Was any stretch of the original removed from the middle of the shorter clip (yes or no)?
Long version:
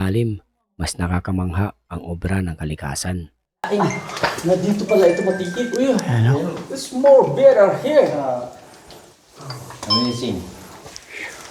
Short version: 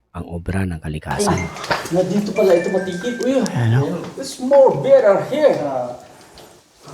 yes